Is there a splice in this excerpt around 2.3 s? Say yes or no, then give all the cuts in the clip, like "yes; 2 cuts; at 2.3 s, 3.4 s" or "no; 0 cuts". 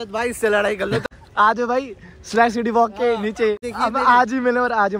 no; 2 cuts; at 1.0 s, 3.7 s